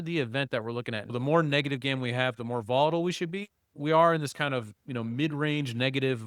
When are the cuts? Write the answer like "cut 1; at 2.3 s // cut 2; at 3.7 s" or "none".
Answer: cut 1; at 1.1 s // cut 2; at 3.8 s